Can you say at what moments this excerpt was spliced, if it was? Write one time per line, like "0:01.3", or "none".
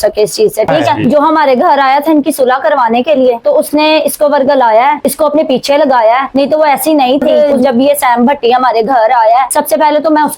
0:01.0
0:07.3